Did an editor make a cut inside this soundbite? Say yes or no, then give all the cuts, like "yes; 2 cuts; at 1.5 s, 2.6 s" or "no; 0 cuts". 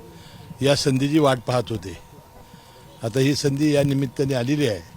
yes; 1 cut; at 1.1 s